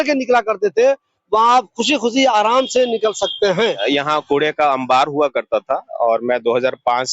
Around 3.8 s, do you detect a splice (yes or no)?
yes